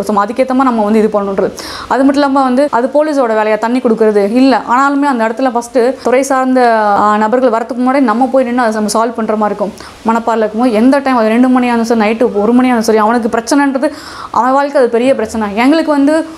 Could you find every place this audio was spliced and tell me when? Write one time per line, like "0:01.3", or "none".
0:02.7
0:06.0
0:07.0
0:09.9